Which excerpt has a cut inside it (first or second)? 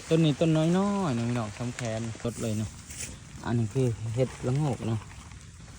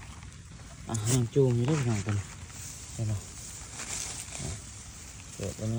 first